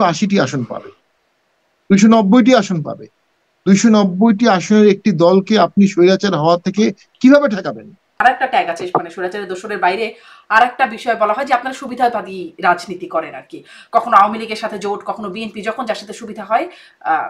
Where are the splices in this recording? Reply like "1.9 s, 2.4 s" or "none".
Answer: 8.2 s

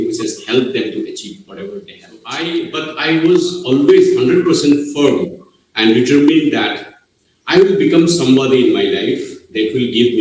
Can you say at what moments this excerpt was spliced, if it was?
2.4 s

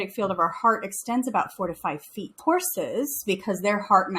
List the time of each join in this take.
2.4 s

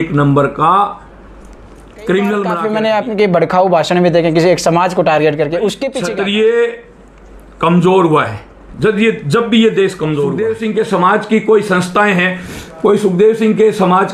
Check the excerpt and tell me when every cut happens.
2.6 s, 5.9 s, 10.5 s

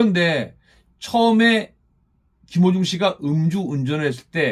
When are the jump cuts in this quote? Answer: none

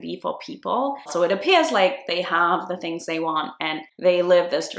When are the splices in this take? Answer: 1.1 s

